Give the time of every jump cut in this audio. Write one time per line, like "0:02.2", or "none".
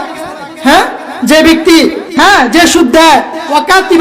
0:02.0